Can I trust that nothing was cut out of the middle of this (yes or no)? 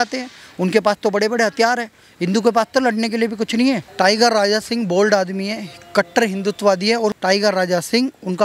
no